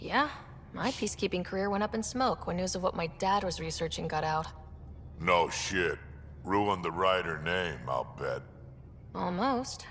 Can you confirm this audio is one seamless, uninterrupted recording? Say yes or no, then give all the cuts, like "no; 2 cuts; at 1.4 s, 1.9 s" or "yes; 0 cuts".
yes; 0 cuts